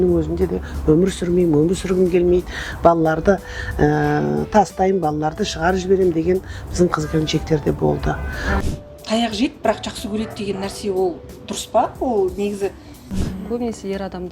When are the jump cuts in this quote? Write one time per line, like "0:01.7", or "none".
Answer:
0:08.6
0:13.1